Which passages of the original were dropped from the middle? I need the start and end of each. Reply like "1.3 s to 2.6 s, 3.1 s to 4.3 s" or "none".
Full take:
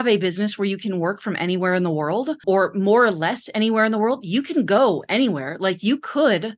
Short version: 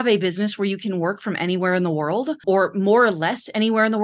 none

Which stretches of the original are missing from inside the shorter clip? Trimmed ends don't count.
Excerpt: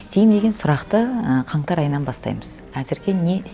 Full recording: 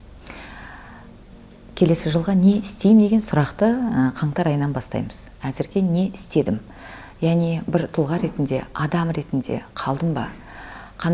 none

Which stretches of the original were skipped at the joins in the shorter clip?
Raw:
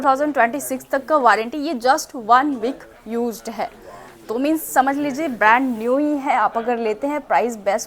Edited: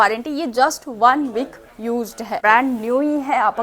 3.7 s to 5.4 s

